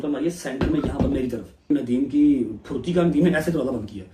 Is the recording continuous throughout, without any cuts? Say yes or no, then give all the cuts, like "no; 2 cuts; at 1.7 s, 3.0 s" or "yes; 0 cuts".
no; 1 cut; at 1.7 s